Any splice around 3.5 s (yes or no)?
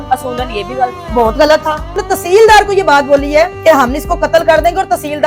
yes